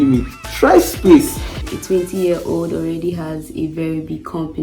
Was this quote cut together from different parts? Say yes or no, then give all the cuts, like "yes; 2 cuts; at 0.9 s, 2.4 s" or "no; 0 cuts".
yes; 1 cut; at 1.6 s